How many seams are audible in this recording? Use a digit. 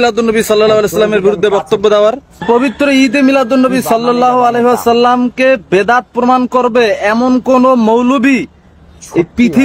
1